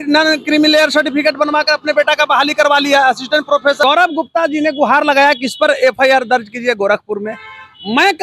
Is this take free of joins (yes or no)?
no